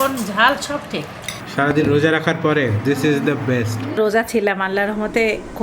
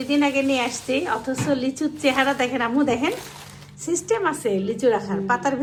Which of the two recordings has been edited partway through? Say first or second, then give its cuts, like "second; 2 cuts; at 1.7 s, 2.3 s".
first; 2 cuts; at 1.4 s, 3.9 s